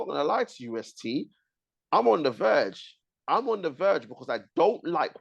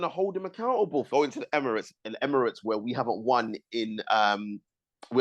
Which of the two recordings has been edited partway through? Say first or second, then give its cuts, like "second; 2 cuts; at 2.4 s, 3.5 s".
second; 1 cut; at 1.1 s